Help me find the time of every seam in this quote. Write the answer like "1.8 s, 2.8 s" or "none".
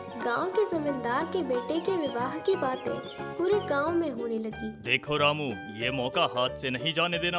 none